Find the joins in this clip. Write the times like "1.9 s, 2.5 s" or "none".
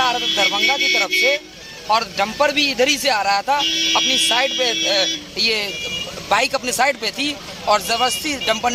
none